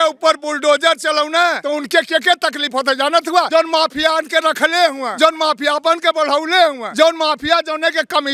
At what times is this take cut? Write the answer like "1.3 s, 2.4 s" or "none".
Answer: 1.6 s, 3.5 s, 5.0 s, 6.8 s